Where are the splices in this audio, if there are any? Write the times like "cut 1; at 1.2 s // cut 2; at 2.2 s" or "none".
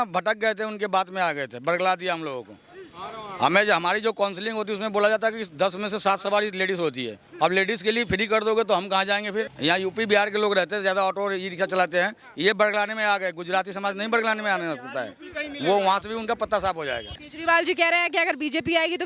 cut 1; at 9.5 s // cut 2; at 17.2 s